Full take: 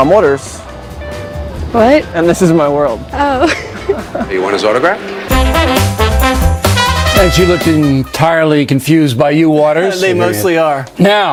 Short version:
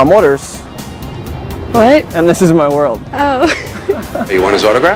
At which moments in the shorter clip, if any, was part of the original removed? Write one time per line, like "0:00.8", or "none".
none